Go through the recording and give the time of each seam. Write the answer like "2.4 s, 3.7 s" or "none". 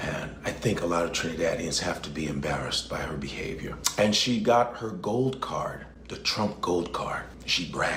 none